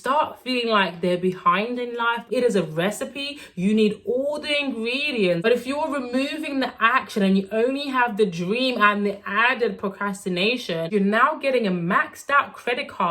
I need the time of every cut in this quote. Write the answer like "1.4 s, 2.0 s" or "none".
2.2 s, 5.5 s, 10.9 s